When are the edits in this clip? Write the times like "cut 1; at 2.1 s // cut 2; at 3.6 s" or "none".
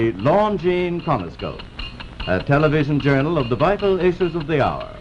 cut 1; at 3.0 s